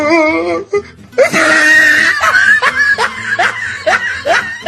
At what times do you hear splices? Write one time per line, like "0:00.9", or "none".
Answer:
0:03.6